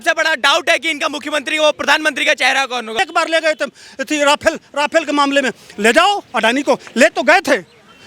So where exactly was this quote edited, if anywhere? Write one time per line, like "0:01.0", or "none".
0:03.0